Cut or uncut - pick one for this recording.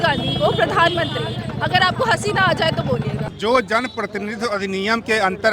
cut